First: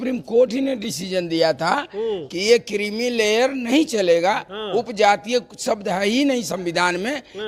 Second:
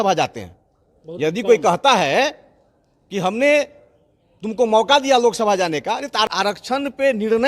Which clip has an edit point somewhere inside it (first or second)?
second